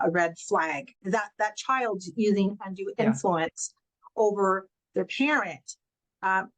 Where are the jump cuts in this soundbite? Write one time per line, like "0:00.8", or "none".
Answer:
0:00.9